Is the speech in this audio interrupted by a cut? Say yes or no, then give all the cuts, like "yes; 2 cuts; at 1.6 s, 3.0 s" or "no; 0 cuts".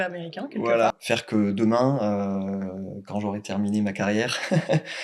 yes; 1 cut; at 1.0 s